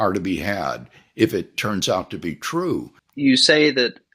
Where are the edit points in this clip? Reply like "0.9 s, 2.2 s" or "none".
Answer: 3.0 s